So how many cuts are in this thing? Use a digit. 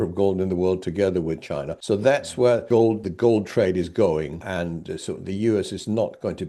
3